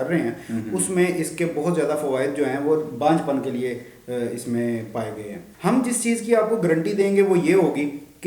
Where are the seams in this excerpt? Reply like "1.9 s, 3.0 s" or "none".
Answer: 5.5 s